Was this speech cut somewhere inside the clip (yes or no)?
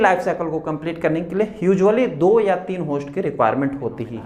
no